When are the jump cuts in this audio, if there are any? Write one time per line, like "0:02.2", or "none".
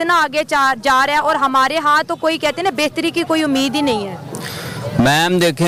none